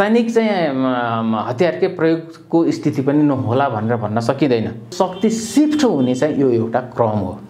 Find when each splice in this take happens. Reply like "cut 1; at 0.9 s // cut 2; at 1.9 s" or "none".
cut 1; at 4.9 s